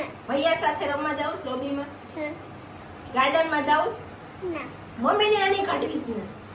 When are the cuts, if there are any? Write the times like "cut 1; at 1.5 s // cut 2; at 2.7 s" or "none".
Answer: none